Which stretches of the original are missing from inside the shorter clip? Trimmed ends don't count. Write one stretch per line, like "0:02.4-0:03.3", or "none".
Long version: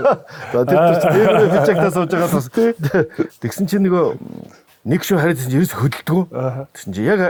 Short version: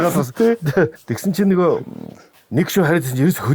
0:03.1-0:03.3